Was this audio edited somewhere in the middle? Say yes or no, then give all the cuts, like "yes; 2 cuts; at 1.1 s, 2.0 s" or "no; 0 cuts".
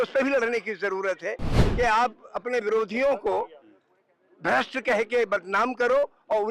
yes; 1 cut; at 1.6 s